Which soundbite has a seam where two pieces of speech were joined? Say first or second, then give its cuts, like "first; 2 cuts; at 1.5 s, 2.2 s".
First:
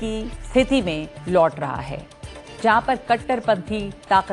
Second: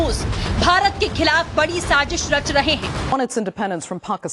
second; 1 cut; at 3.1 s